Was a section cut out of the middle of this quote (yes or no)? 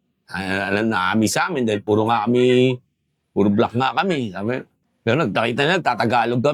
no